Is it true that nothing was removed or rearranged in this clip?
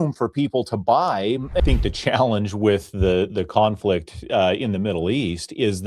no; 1 cut; at 1.6 s

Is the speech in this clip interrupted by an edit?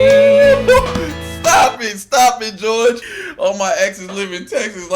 yes; 1 cut; at 3.1 s

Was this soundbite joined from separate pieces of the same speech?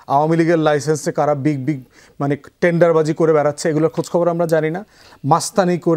no; 0 cuts

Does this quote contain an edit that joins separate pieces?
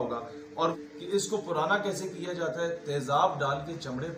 yes; 1 cut; at 1.0 s

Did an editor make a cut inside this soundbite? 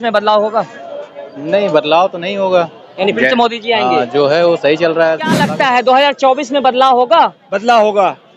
yes; 1 cut; at 5.3 s

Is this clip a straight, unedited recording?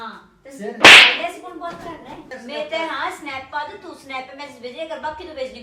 no; 1 cut; at 2.3 s

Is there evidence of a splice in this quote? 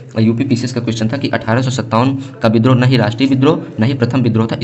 no; 0 cuts

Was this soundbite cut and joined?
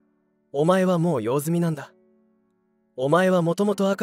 no; 0 cuts

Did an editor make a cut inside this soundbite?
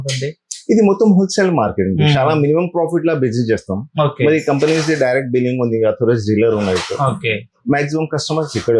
no; 0 cuts

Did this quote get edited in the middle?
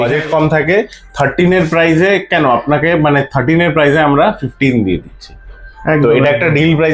no; 0 cuts

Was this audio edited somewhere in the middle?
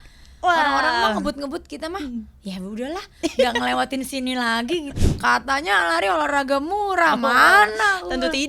yes; 1 cut; at 5.0 s

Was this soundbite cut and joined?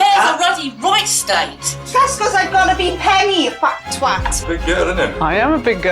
yes; 1 cut; at 4.3 s

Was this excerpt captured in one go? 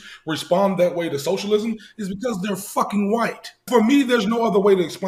no; 1 cut; at 3.6 s

